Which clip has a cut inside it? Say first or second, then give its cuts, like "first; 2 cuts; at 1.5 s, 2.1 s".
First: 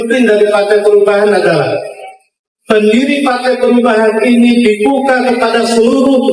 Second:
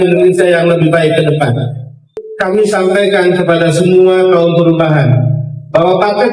second; 1 cut; at 2.2 s